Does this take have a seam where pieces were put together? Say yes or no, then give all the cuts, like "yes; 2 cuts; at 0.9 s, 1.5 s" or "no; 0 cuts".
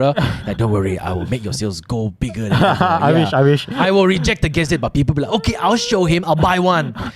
no; 0 cuts